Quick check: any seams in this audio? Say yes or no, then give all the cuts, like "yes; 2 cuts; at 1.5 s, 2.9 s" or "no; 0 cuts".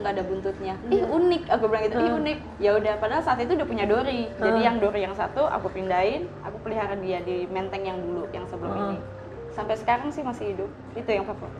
no; 0 cuts